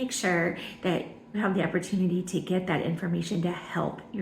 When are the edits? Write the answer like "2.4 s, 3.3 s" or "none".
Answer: 1.4 s